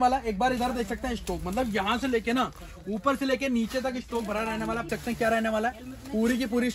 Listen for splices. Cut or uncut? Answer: cut